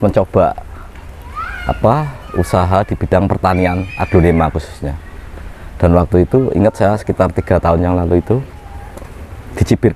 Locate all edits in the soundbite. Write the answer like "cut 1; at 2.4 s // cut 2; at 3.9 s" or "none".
none